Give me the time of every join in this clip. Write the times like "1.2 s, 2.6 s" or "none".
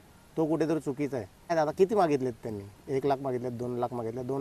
1.5 s